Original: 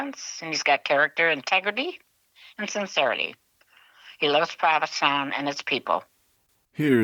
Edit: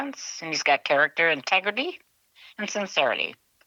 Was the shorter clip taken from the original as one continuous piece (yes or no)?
yes